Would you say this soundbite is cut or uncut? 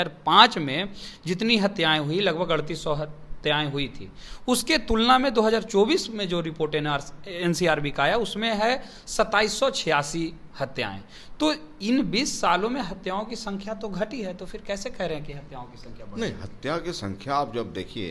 uncut